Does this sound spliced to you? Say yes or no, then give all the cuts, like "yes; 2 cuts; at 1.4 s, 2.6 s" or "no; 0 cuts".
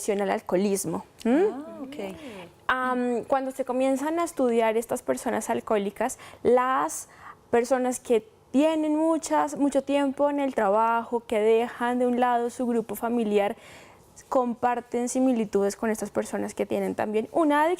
yes; 1 cut; at 9.9 s